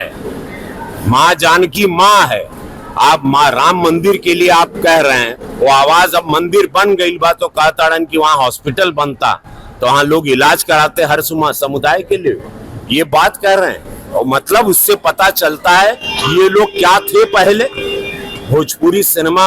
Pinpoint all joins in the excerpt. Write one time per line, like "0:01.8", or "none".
none

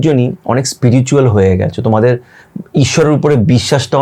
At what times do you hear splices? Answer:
none

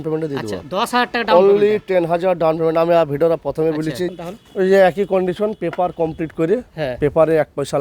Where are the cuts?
0:04.1

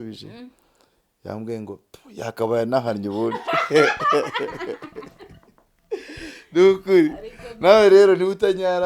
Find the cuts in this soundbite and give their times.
none

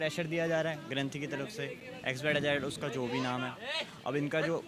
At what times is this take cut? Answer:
none

